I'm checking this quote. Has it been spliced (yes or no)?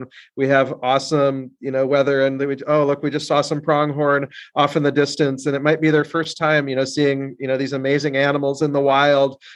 no